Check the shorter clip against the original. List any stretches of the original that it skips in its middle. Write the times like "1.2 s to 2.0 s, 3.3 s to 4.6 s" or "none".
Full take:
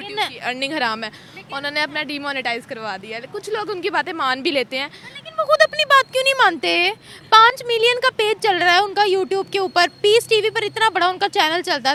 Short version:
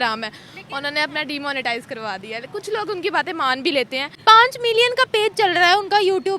4.8 s to 7.1 s